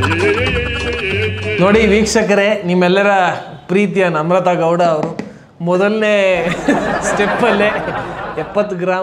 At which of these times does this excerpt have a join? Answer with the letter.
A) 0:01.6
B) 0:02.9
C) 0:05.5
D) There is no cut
A